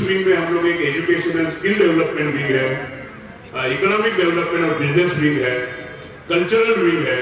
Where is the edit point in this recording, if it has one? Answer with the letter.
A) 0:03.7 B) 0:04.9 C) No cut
C